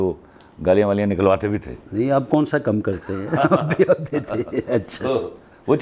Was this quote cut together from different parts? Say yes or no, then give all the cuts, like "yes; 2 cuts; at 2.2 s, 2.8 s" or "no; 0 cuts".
no; 0 cuts